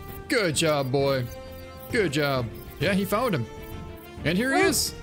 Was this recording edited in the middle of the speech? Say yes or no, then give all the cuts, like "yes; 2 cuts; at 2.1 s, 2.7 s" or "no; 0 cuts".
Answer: yes; 1 cut; at 2.6 s